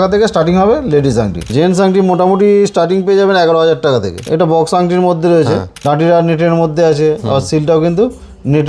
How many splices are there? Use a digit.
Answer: 3